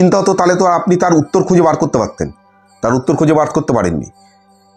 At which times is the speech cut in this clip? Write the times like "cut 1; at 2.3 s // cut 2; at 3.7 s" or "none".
none